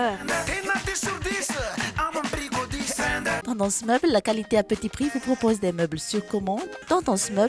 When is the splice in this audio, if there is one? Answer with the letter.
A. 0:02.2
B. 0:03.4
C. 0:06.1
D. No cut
B